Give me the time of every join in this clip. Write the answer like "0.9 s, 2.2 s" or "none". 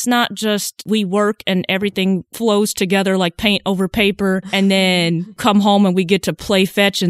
0.8 s, 4.5 s, 5.4 s